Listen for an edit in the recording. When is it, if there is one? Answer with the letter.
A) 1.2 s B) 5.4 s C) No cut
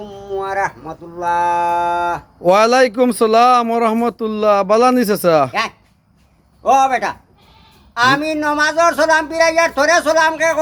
C